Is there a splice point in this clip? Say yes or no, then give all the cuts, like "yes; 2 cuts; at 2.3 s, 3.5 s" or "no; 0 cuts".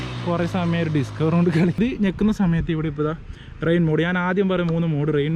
yes; 1 cut; at 1.8 s